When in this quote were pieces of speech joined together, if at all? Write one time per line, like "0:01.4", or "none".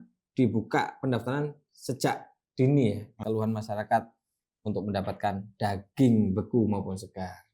0:03.1